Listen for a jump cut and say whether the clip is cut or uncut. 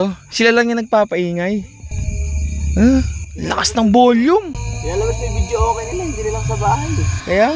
uncut